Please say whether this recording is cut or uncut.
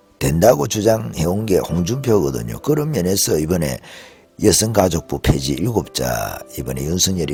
uncut